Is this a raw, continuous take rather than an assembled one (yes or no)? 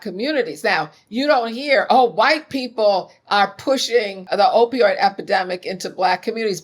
no